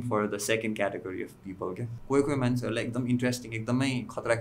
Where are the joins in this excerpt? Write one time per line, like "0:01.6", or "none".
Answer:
0:01.9